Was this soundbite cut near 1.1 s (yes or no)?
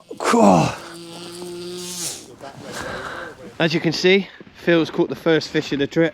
no